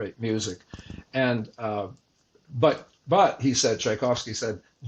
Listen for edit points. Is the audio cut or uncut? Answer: uncut